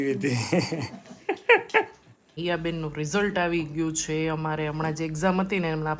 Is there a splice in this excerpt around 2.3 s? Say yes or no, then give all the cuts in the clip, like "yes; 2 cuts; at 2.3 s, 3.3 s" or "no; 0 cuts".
yes; 1 cut; at 2.3 s